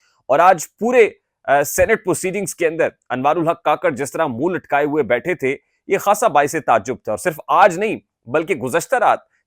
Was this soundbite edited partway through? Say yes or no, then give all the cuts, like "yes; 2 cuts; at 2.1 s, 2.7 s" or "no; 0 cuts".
no; 0 cuts